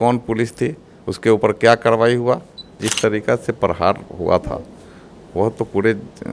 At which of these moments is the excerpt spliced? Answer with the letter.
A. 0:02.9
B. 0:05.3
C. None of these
A